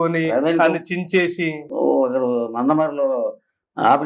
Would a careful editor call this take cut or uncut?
cut